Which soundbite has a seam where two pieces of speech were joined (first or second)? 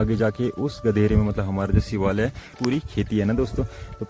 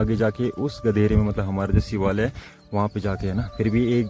first